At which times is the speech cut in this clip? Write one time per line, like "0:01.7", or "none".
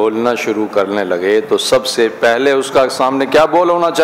none